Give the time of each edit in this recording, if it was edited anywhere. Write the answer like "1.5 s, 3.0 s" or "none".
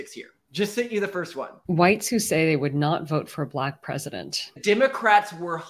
1.5 s, 4.6 s